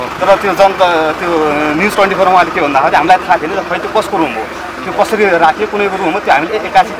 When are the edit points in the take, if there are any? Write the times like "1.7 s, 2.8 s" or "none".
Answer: none

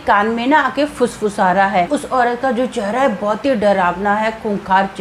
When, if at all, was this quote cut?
1.9 s

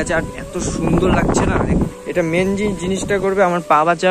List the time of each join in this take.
2.0 s

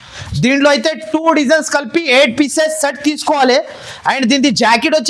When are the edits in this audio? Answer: none

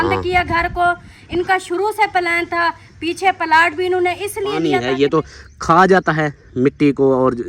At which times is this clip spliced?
4.6 s

